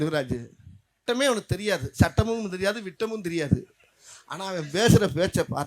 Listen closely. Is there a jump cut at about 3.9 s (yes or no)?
no